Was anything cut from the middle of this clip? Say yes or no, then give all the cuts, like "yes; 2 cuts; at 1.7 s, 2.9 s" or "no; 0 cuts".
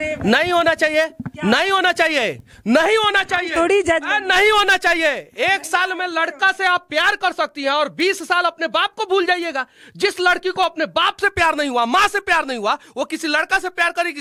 no; 0 cuts